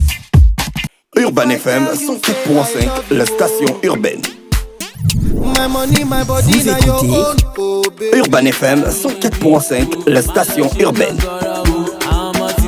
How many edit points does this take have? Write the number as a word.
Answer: one